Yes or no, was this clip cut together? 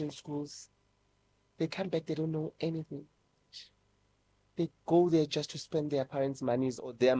no